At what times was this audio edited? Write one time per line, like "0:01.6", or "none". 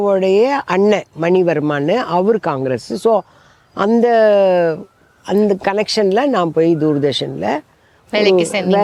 none

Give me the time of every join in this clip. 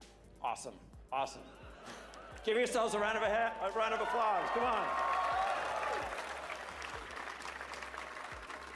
0:04.7

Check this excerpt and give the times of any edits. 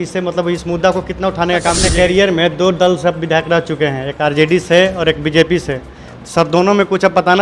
0:01.8

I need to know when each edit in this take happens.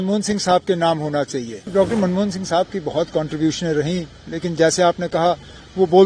0:01.7

